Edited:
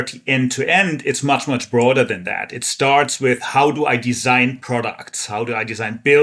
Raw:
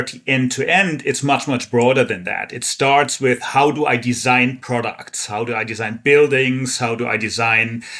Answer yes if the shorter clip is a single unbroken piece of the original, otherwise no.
yes